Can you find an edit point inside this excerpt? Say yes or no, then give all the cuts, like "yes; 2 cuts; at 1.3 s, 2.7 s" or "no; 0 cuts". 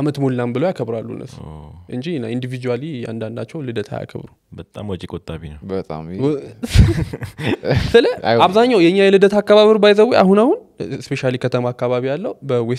no; 0 cuts